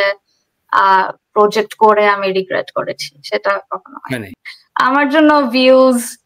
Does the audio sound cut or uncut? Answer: cut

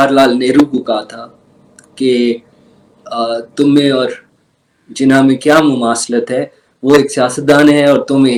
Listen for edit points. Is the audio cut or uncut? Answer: uncut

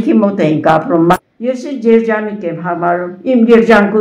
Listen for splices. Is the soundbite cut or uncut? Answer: cut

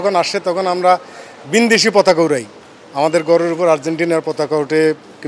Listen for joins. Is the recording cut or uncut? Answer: uncut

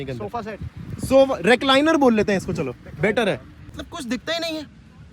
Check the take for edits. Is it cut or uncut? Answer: cut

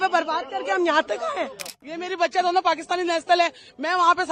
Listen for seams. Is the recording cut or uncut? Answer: cut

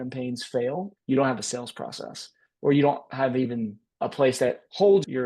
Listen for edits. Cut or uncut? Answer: cut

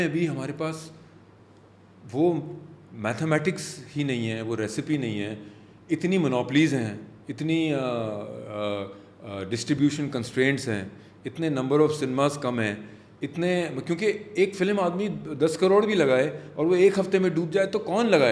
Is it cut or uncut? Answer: uncut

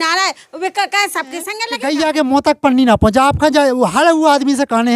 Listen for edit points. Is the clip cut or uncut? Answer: cut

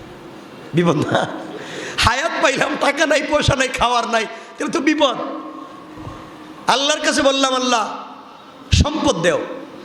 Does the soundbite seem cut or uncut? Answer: uncut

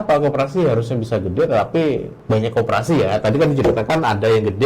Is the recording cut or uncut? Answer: cut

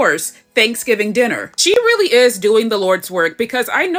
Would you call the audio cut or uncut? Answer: uncut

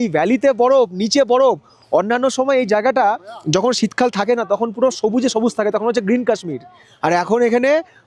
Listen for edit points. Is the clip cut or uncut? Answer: uncut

